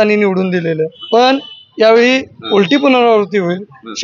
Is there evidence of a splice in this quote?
yes; 2 cuts; at 1.0 s, 2.3 s

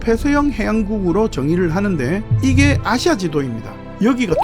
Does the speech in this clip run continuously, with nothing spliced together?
no; 1 cut; at 2.3 s

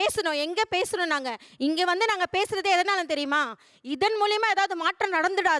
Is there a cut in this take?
yes; 1 cut; at 1.4 s

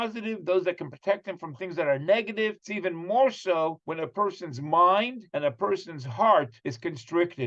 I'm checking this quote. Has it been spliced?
no; 0 cuts

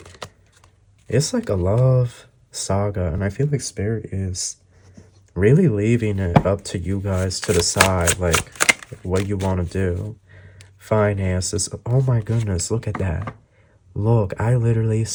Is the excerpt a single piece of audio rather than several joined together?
yes; 0 cuts

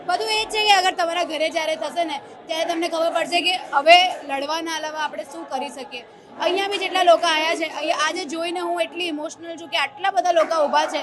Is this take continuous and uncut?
yes; 0 cuts

